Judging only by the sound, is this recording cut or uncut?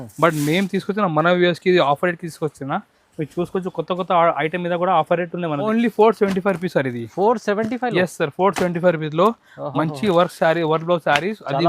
cut